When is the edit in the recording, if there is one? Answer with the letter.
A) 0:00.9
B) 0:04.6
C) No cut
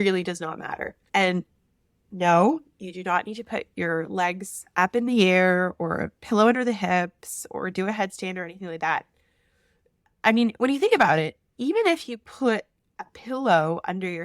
A